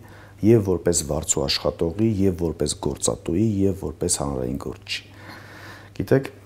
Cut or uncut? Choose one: uncut